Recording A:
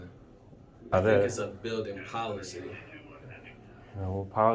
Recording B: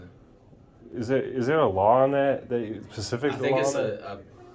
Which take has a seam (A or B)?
A